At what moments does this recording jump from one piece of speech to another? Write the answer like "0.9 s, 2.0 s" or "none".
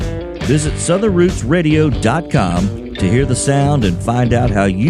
none